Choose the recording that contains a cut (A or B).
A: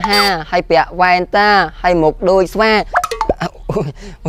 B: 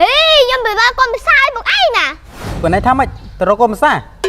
B